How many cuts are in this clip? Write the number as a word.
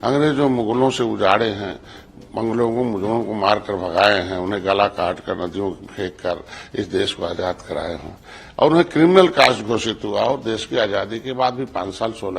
zero